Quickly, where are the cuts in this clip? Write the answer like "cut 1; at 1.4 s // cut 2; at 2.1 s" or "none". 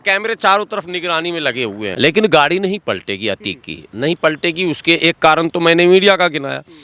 cut 1; at 1.9 s